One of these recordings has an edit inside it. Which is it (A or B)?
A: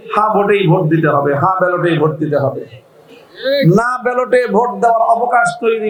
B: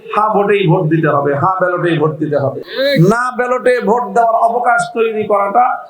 B